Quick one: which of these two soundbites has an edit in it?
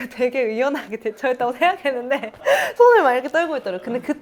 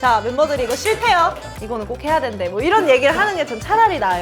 second; 1 cut; at 1.4 s

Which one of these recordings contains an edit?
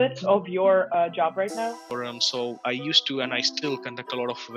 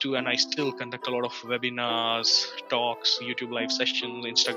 first; 1 cut; at 1.9 s

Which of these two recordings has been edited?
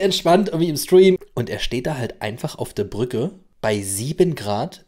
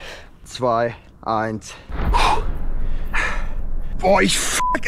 first; 2 cuts; at 1.2 s, 3.4 s

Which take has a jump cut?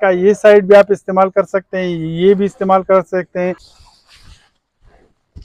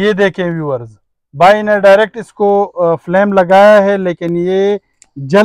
first; 1 cut; at 3.8 s

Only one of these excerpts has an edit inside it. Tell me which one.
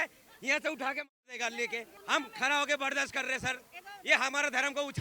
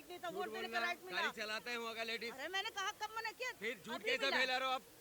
first; 1 cut; at 1.9 s

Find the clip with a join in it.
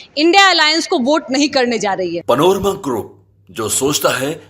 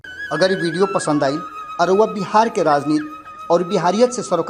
first; 1 cut; at 2.2 s

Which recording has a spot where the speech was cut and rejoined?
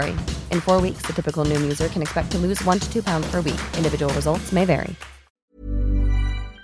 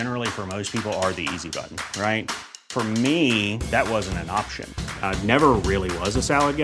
first; 1 cut; at 5.3 s

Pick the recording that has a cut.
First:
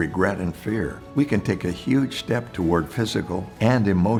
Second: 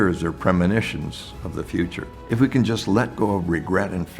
second; 1 cut; at 2.1 s

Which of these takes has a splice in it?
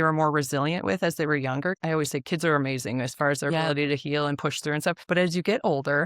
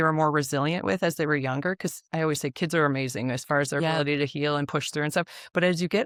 first; 2 cuts; at 1.8 s, 5.0 s

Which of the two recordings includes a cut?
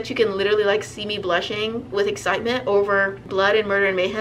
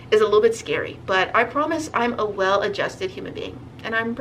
first; 1 cut; at 3.2 s

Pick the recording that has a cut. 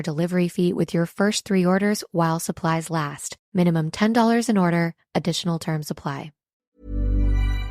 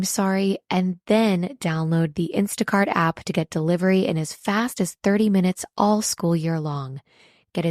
first; 1 cut; at 6.5 s

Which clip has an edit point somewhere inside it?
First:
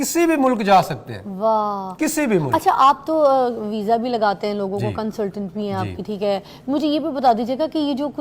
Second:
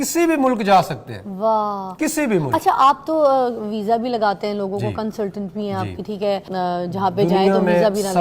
second; 1 cut; at 6.5 s

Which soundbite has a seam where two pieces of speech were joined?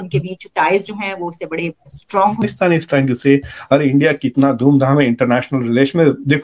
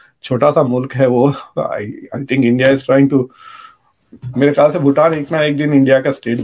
first; 1 cut; at 2.4 s

